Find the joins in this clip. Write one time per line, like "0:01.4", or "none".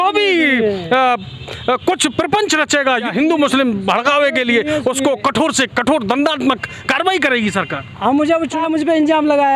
0:03.1
0:08.6